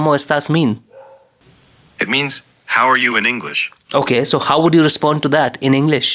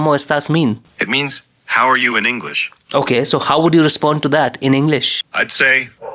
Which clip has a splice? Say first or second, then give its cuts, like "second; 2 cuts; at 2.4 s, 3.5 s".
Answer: second; 2 cuts; at 0.9 s, 5.2 s